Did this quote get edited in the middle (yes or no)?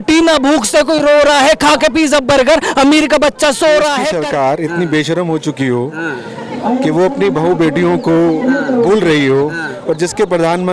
yes